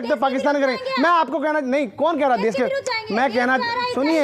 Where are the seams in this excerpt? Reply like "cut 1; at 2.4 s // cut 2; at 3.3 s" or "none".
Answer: none